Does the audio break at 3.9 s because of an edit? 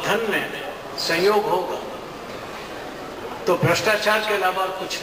no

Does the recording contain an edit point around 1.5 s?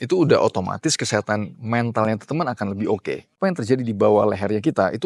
no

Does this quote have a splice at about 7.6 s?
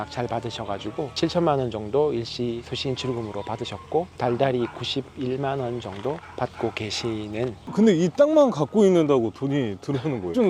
yes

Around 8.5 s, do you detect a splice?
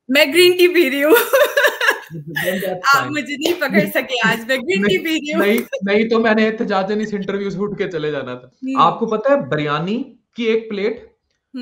yes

